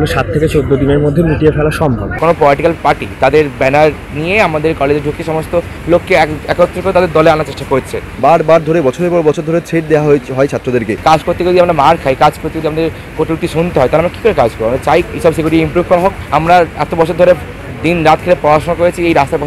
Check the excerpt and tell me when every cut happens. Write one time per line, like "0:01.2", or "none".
0:02.2
0:08.1
0:10.9
0:16.2

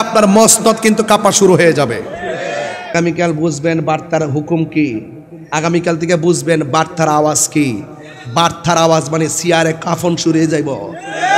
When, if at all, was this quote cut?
0:02.9

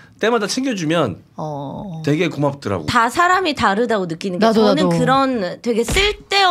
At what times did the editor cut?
0:02.9

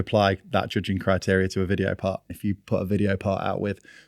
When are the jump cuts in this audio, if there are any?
0:02.4

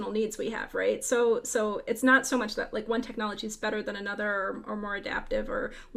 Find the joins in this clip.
none

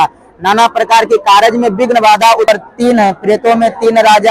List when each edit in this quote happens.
0:02.5

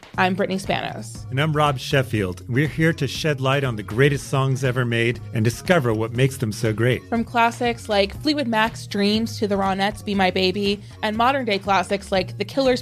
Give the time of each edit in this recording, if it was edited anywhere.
none

